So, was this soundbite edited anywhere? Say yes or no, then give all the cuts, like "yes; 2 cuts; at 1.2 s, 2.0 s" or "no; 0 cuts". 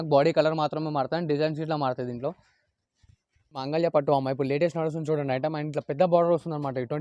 yes; 1 cut; at 3.6 s